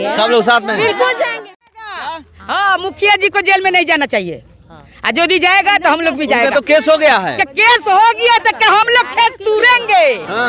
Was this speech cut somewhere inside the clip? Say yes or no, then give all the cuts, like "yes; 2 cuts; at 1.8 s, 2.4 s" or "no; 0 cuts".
yes; 1 cut; at 1.3 s